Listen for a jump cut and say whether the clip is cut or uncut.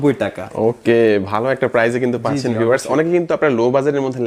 uncut